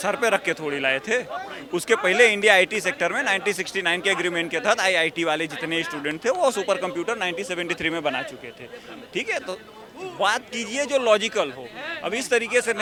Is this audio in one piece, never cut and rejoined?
yes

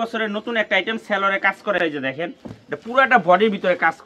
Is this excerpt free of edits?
yes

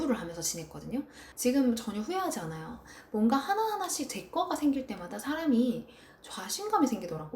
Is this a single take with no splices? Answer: no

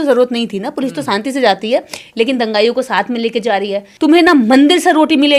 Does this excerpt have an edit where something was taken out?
yes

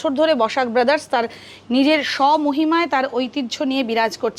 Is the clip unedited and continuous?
yes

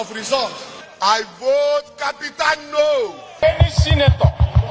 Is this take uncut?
no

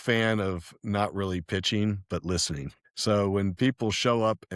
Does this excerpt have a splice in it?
no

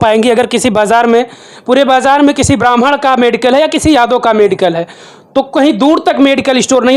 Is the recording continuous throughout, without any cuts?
yes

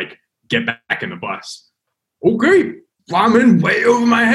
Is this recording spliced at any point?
yes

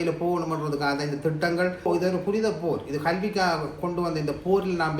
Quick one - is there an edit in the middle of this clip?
yes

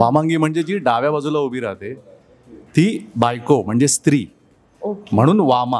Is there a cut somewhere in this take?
no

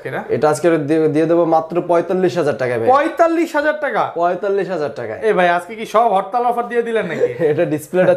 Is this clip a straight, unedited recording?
yes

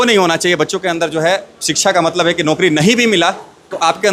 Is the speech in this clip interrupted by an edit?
no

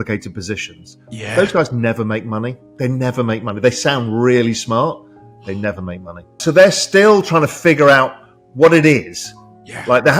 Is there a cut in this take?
yes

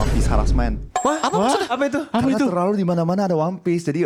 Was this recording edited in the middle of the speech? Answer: no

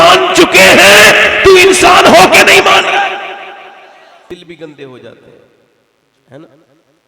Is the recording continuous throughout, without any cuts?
no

